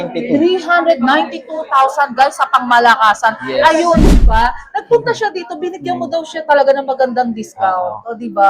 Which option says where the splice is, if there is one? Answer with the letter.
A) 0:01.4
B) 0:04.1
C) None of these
B